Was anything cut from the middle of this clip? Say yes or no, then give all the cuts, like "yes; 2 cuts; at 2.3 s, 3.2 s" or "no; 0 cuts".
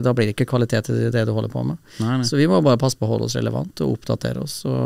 no; 0 cuts